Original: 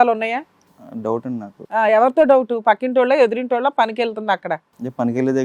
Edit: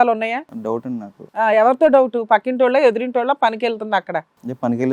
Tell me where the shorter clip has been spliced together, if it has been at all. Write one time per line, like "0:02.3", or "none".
0:01.0